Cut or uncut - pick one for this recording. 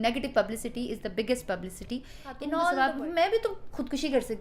cut